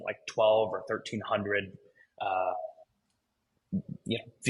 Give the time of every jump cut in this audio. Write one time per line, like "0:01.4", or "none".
none